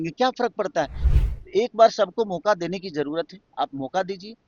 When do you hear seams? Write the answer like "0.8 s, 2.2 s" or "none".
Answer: 1.0 s